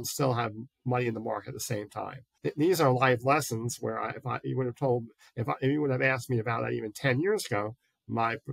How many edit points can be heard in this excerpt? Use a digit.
1